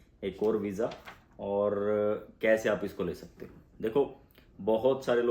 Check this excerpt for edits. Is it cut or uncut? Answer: uncut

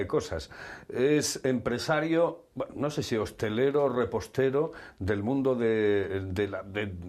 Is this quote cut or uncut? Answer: uncut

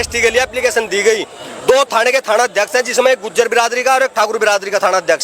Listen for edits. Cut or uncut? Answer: uncut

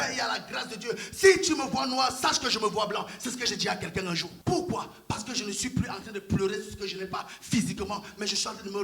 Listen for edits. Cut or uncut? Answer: cut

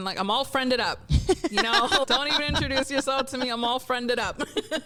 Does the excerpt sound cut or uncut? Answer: uncut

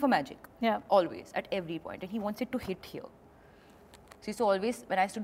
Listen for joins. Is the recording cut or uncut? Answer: uncut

